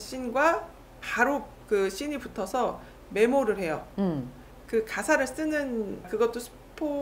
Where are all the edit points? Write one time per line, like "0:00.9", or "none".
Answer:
none